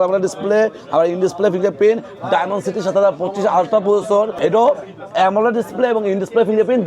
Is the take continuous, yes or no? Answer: no